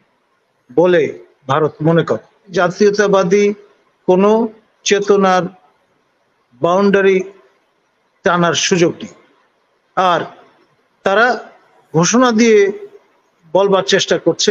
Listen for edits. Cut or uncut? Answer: cut